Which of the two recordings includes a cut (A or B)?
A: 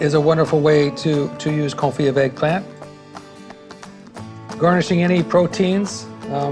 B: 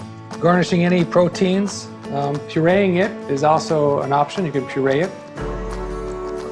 B